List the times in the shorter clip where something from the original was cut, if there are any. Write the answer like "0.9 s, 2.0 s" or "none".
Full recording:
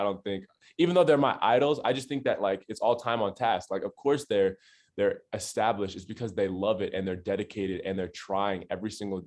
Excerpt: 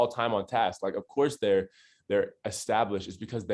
none